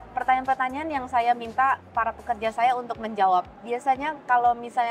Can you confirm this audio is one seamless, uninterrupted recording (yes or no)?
yes